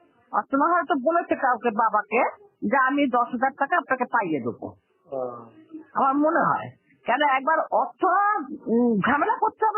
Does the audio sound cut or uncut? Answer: uncut